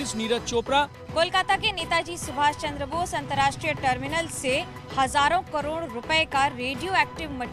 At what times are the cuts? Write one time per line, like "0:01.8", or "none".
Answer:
0:01.0